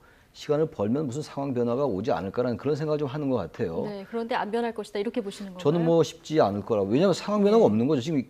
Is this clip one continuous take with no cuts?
no; 1 cut; at 6.9 s

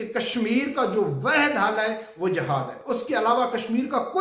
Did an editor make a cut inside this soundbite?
no; 0 cuts

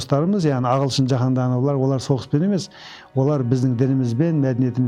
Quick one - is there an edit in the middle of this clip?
no; 0 cuts

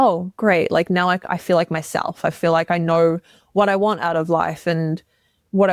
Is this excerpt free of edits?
yes; 0 cuts

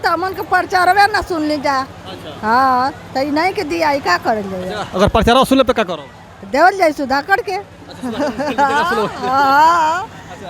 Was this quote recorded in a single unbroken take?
yes; 0 cuts

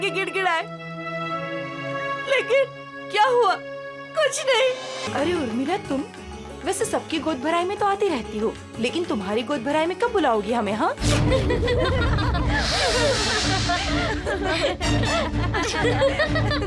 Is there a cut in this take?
yes; 1 cut; at 5.1 s

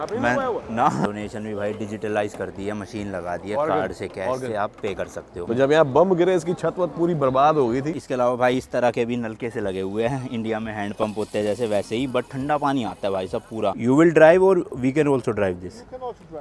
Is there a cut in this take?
yes; 4 cuts; at 1.0 s, 5.4 s, 7.9 s, 13.7 s

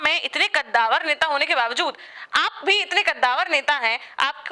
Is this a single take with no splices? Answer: yes; 0 cuts

